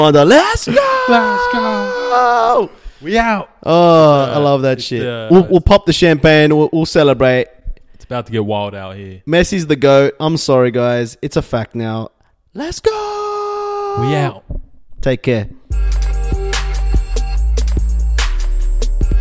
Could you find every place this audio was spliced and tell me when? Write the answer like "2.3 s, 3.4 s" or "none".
none